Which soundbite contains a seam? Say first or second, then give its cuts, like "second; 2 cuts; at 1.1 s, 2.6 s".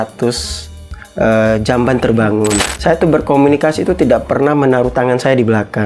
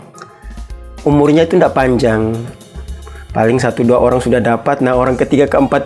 first; 1 cut; at 2.7 s